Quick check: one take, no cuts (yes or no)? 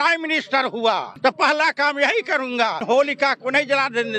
no